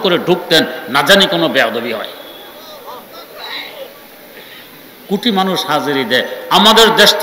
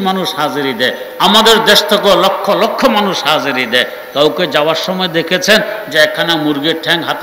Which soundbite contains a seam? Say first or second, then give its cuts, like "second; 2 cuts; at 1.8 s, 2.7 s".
first; 1 cut; at 3.9 s